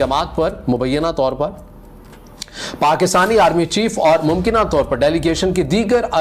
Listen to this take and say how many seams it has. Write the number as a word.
zero